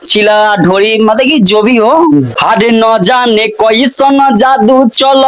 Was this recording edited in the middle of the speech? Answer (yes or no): yes